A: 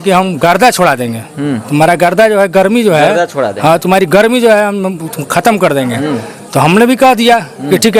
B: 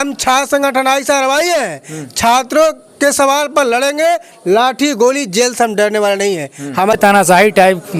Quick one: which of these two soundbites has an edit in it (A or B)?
B